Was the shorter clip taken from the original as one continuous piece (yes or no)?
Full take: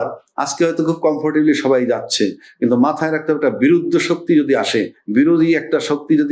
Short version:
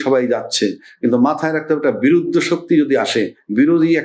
yes